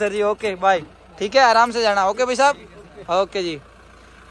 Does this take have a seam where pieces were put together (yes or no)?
no